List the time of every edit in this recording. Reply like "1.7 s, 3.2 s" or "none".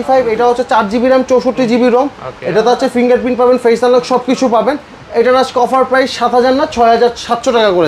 none